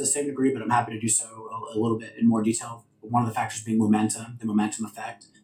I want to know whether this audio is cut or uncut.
uncut